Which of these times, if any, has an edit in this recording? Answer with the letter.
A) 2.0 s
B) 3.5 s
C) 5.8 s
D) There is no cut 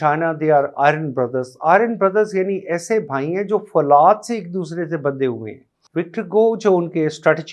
D